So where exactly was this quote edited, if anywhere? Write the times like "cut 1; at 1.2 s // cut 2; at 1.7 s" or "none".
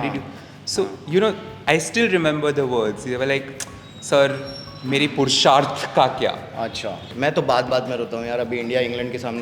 cut 1; at 7.0 s